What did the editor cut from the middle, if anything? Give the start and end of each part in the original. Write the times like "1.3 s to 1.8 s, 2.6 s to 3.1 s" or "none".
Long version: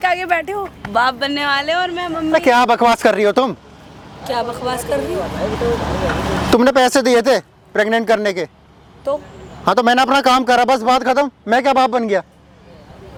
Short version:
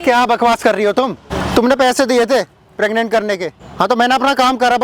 3.7 s to 6.3 s, 8.5 s to 9.4 s